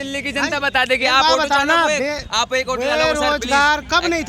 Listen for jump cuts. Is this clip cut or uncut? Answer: uncut